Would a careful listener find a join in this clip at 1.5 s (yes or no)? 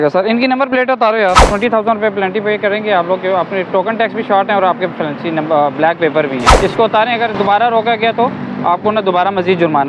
yes